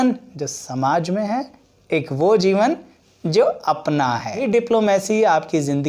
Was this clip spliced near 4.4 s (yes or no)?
yes